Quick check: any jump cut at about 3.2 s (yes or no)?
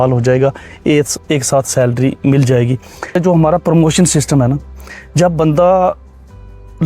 yes